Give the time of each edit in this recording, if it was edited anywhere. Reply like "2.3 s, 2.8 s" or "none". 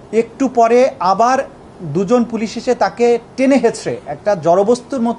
none